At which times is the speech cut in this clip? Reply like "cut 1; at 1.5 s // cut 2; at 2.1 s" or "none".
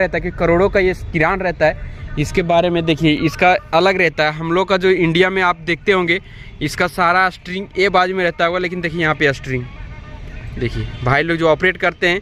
none